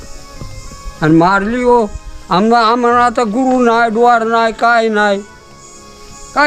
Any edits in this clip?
no; 0 cuts

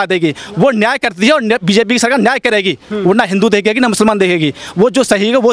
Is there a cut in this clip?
no; 0 cuts

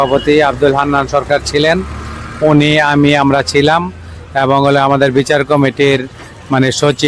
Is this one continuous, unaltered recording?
yes; 0 cuts

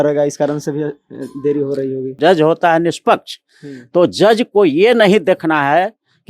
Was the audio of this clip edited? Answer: yes; 1 cut; at 2.1 s

